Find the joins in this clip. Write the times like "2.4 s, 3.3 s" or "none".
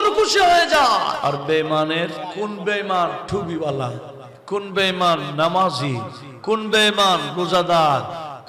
1.2 s, 2.2 s

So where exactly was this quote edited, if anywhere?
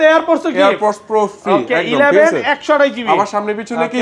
none

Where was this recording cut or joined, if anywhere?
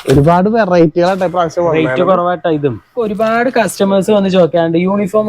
3.0 s

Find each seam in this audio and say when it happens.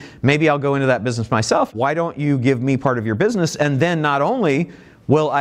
1.7 s

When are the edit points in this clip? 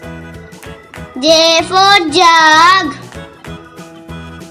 1.1 s, 3.0 s

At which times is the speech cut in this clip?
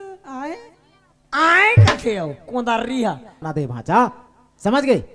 3.4 s

